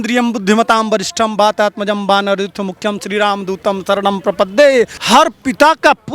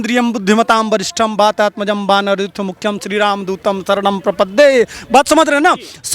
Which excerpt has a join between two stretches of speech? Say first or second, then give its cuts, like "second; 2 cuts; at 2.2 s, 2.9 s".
first; 1 cut; at 5.0 s